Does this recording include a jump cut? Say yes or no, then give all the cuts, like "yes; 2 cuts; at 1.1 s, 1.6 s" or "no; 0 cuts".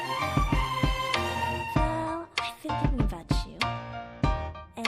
yes; 1 cut; at 1.7 s